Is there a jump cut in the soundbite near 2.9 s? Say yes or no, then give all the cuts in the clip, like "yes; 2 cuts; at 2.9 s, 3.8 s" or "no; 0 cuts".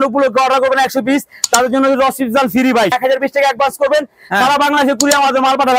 yes; 1 cut; at 2.9 s